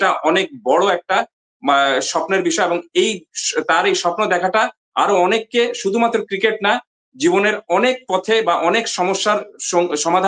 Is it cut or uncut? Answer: uncut